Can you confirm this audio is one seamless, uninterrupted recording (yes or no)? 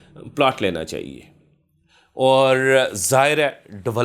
yes